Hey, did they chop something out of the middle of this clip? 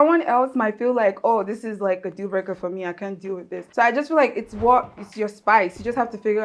yes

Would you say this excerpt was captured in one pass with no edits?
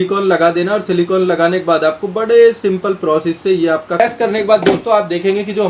no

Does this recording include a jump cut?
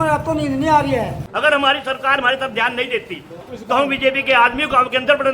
yes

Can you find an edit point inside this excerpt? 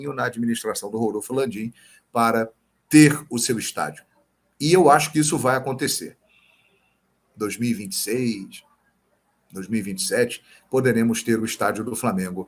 no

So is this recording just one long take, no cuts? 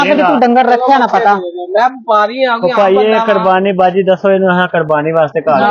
yes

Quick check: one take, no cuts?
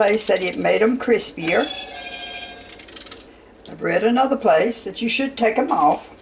no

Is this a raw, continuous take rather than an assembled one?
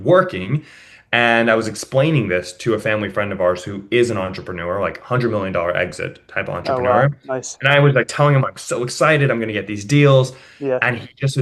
yes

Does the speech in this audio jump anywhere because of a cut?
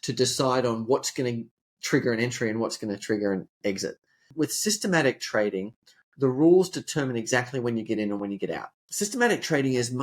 yes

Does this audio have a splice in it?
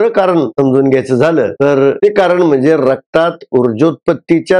yes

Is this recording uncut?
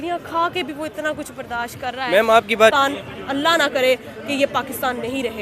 no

